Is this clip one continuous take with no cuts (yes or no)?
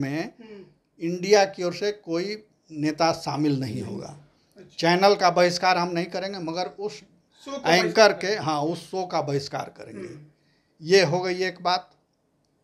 yes